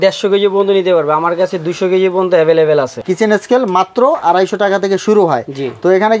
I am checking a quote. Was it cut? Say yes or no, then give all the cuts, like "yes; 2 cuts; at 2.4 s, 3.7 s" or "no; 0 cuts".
yes; 1 cut; at 3.0 s